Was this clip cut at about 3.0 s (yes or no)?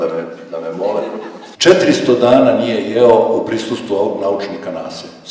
no